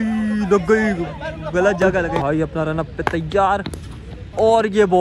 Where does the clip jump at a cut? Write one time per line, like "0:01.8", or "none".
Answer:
0:02.2